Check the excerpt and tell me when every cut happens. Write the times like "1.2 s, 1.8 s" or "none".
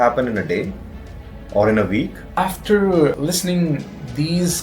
2.2 s, 3.2 s